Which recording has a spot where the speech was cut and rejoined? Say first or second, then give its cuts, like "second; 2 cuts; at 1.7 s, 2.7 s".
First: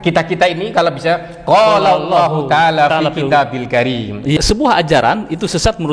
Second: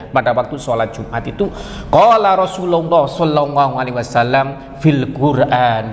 first; 1 cut; at 4.3 s